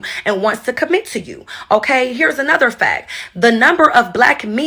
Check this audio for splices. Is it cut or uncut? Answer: cut